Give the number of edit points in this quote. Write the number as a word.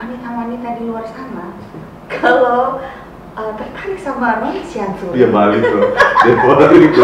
one